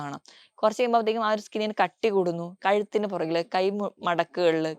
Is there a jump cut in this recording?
no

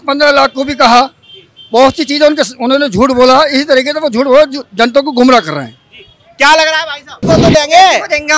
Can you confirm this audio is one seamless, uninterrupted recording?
no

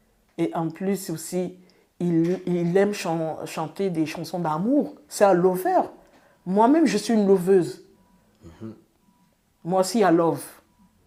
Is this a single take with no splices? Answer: yes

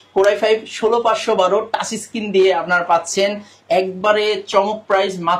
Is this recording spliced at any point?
no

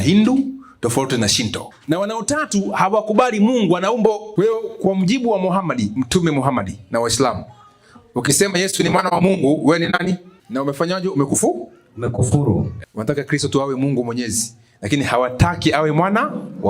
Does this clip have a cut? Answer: yes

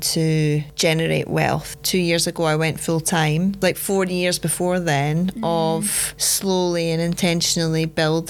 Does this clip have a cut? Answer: yes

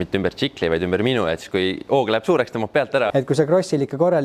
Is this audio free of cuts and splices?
no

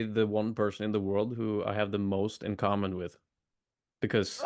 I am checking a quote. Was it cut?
no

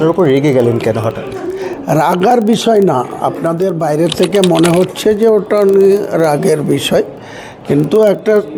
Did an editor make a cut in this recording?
no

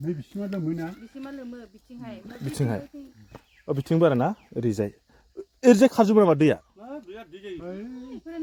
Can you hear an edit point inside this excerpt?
no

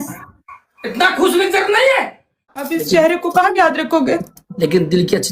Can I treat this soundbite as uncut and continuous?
no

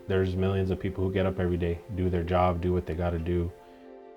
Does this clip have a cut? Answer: no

